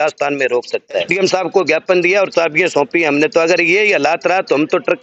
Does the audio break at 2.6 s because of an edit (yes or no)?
no